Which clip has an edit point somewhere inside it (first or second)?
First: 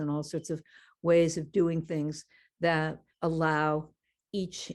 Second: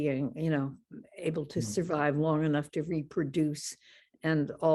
first